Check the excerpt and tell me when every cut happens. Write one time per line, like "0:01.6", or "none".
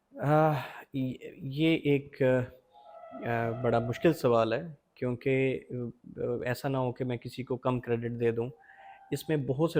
none